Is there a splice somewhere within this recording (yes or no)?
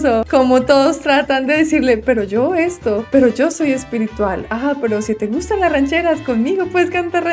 no